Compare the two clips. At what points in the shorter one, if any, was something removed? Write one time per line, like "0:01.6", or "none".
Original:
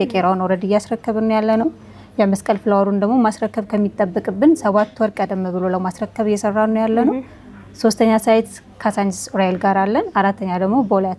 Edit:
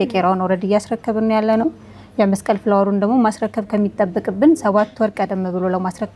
none